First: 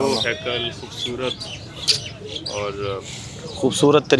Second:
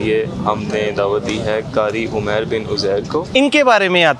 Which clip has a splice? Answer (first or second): second